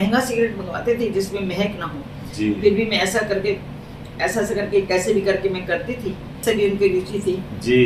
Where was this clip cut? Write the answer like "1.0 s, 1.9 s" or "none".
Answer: 6.4 s